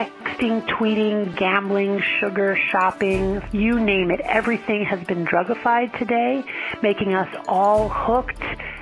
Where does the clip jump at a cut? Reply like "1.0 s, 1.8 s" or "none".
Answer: 1.3 s, 3.4 s